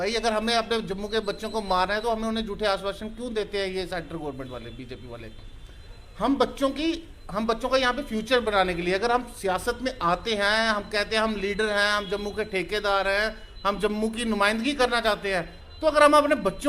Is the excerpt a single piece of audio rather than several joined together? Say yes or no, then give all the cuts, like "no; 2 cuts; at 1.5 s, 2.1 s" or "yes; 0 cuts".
yes; 0 cuts